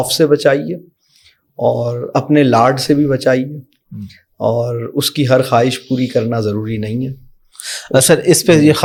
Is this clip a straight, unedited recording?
yes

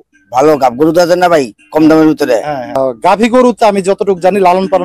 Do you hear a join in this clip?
yes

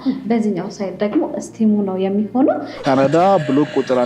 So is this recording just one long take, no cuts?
no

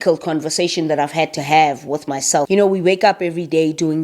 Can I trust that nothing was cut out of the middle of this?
no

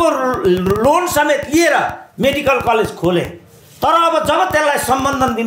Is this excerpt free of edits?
yes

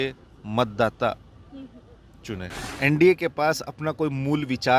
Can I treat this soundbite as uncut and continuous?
no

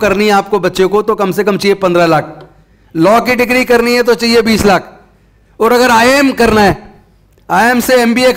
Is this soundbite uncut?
yes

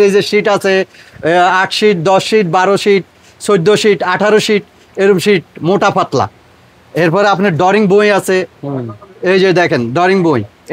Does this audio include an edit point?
no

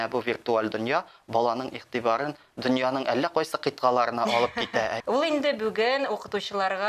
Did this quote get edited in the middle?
yes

